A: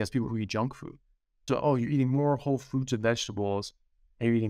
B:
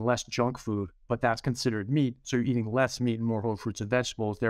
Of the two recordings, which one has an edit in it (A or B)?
A